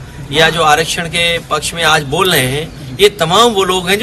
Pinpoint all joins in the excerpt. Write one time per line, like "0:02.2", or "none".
none